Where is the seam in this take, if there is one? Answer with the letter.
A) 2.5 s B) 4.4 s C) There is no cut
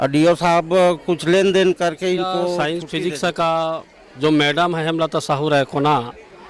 A